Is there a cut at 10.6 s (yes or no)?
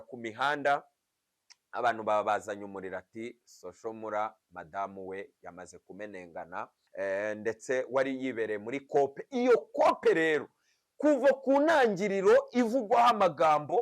no